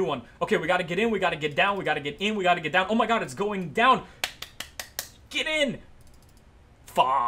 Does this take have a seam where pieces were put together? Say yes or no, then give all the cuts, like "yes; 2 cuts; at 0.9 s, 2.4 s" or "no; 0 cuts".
no; 0 cuts